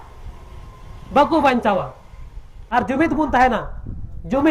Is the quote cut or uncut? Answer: cut